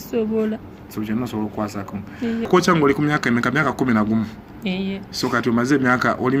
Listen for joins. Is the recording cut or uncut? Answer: cut